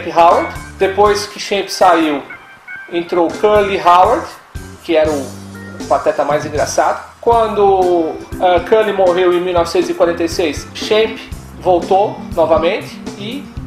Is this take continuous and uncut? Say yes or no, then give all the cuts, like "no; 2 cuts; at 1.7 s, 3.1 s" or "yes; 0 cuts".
yes; 0 cuts